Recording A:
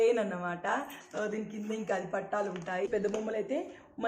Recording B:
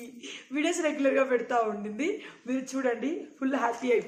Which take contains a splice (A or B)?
A